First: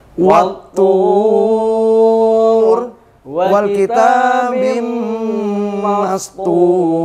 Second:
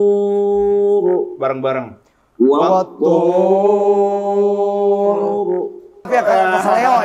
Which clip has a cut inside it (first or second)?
second